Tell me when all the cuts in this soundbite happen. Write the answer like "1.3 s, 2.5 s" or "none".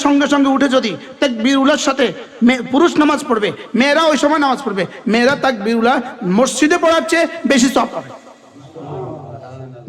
none